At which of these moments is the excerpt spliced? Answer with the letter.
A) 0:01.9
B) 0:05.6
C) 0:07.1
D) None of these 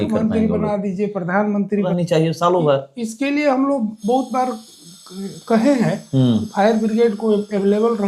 A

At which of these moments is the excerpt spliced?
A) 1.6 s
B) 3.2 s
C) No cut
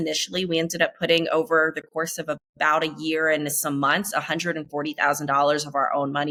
C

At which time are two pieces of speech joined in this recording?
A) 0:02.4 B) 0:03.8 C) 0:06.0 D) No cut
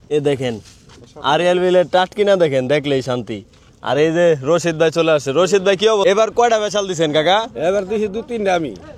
C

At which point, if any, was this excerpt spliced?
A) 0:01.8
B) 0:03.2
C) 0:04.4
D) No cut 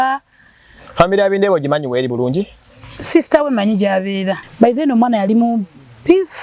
C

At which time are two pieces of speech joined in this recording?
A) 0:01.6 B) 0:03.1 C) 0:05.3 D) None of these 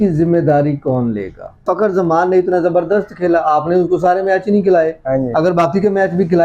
A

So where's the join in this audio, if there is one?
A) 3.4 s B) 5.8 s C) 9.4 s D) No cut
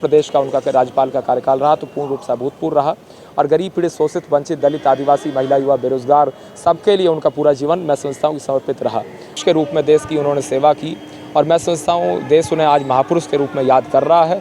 C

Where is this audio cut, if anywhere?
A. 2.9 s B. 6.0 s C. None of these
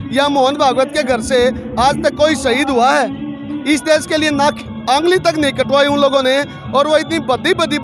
C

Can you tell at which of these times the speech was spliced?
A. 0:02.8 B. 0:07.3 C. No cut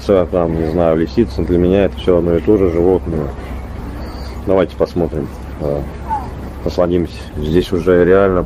B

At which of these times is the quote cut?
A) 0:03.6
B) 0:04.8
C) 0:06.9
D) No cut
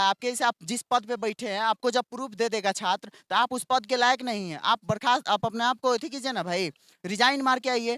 D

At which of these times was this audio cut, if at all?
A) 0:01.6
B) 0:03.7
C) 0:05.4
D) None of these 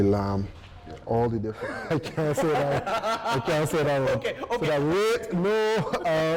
A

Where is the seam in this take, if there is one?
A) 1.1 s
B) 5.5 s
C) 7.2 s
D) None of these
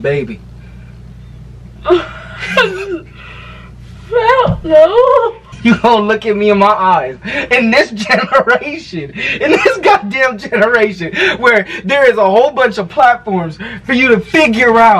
B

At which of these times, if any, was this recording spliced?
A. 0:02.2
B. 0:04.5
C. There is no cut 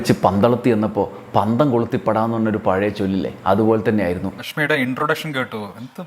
B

